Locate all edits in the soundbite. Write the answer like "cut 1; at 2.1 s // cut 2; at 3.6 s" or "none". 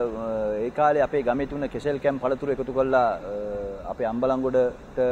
none